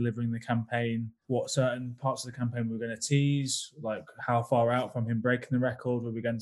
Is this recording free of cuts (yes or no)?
no